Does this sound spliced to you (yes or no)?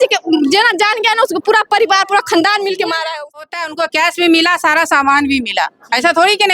yes